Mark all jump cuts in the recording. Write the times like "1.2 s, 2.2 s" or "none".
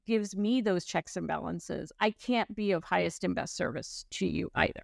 none